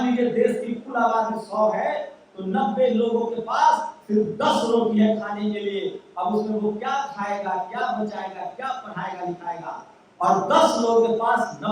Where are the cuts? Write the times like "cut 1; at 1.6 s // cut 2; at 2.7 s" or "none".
none